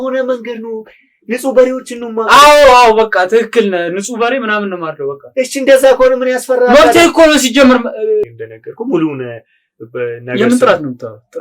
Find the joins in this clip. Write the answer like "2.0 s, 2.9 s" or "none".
8.4 s